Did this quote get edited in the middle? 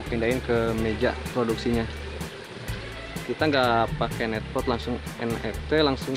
no; 0 cuts

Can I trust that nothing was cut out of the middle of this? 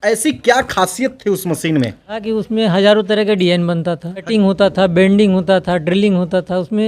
no; 2 cuts; at 2.2 s, 4.3 s

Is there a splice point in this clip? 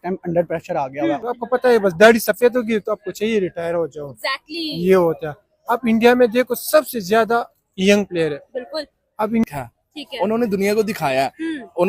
yes; 2 cuts; at 1.2 s, 9.4 s

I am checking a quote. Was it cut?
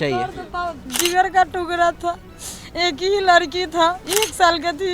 yes; 2 cuts; at 0.9 s, 4.0 s

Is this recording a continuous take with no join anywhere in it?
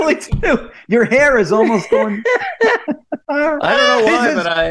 no; 1 cut; at 3.1 s

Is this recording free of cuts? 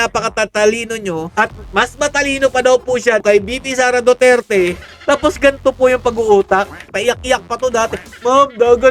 no; 2 cuts; at 4.9 s, 6.9 s

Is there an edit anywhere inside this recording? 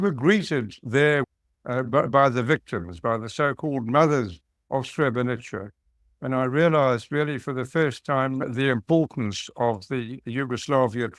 yes; 2 cuts; at 1.3 s, 8.4 s

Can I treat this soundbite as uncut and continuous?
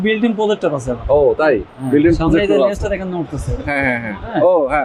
yes; 0 cuts

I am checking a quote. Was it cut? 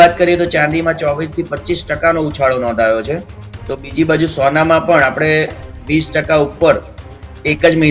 no; 0 cuts

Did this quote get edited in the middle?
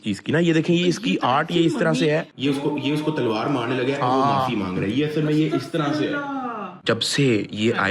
yes; 1 cut; at 6.8 s

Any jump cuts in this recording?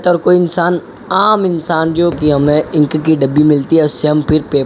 yes; 1 cut; at 2.2 s

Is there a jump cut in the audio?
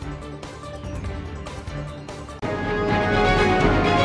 no; 0 cuts

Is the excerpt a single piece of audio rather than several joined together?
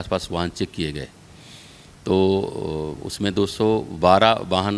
yes; 0 cuts

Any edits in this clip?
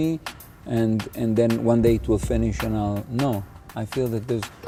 no; 0 cuts

